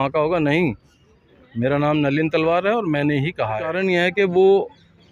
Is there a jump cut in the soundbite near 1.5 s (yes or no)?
no